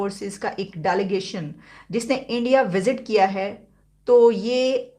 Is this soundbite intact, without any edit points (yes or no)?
yes